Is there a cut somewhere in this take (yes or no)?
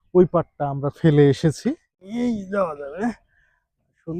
yes